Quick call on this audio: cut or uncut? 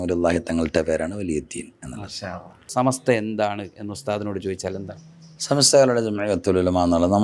cut